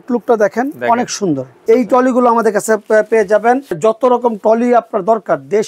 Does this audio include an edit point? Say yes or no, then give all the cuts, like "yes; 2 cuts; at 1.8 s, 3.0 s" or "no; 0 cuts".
yes; 2 cuts; at 1.5 s, 3.8 s